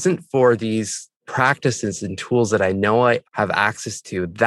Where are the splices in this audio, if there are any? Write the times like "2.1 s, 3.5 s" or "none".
1.2 s